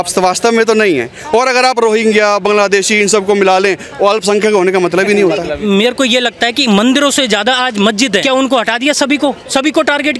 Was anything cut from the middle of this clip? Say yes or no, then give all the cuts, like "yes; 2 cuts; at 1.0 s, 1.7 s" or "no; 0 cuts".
yes; 2 cuts; at 5.6 s, 8.2 s